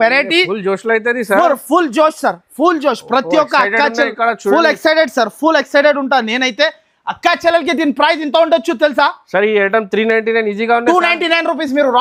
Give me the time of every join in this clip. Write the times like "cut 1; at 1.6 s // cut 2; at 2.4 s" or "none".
none